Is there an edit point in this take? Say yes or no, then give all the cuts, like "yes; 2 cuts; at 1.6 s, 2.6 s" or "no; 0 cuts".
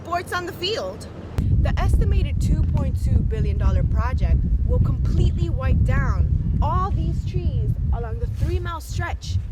yes; 1 cut; at 1.4 s